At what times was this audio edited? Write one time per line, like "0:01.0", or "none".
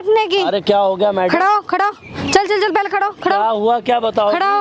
none